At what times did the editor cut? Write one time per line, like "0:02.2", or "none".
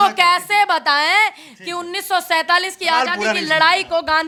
none